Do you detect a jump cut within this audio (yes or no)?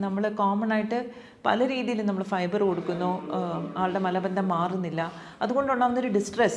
no